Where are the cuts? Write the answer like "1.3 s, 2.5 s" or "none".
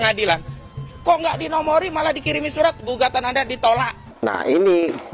4.0 s